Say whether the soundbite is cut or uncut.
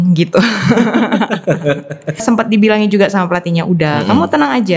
cut